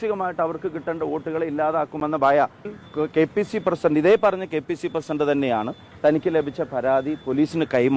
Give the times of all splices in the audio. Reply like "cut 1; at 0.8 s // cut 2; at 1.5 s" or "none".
cut 1; at 2.7 s